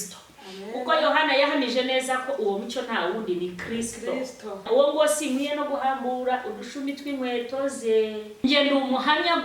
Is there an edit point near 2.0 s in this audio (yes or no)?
no